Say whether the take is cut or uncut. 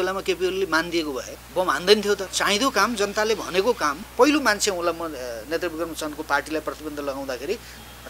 cut